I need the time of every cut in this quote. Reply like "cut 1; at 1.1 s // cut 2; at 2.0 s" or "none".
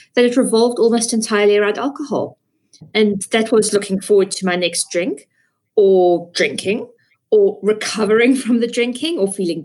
none